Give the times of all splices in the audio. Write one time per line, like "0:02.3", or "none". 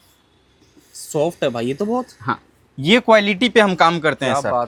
none

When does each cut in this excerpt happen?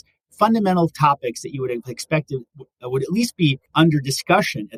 none

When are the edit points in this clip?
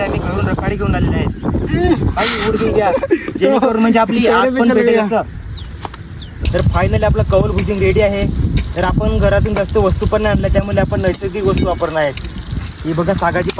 0:06.4

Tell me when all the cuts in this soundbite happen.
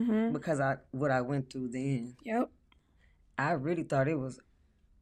none

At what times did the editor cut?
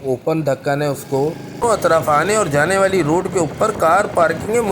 0:01.6

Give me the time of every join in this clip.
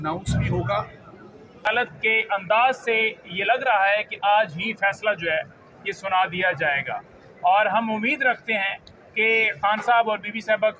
0:01.7

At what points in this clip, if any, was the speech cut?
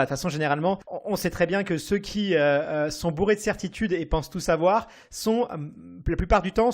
0:00.9

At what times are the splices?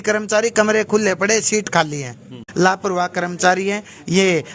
0:02.4

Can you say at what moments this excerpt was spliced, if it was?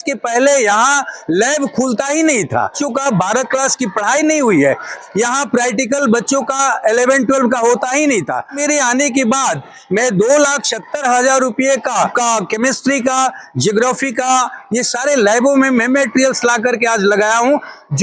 0:02.7
0:05.0
0:08.6
0:12.1

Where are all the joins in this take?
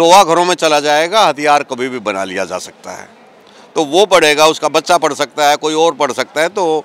none

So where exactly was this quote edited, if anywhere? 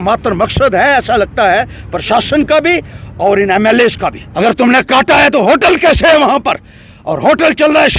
0:04.2

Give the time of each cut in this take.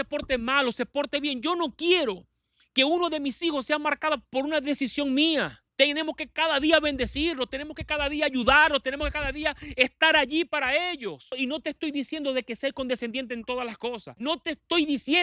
0:05.6
0:11.4
0:14.1

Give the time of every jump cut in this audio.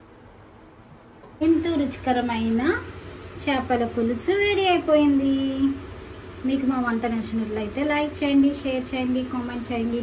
0:01.4

